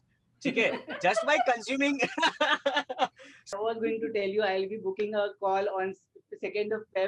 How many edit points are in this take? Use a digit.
1